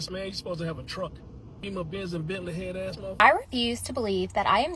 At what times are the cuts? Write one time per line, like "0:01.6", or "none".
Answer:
0:01.6
0:03.1